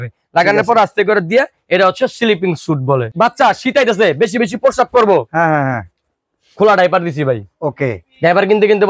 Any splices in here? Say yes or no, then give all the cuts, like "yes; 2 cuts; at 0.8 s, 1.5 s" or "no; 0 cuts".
yes; 1 cut; at 3.1 s